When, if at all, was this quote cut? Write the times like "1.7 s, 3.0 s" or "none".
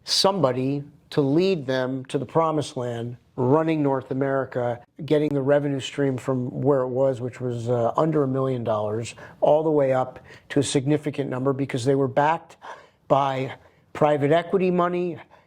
4.9 s